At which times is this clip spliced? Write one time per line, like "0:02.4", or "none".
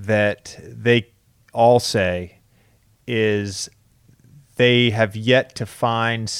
none